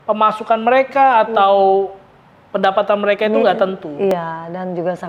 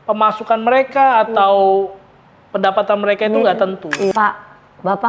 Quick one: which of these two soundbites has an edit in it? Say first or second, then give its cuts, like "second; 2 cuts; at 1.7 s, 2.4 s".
second; 1 cut; at 4.1 s